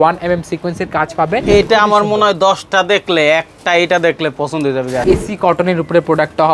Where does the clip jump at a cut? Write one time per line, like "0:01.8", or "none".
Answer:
0:01.4
0:05.0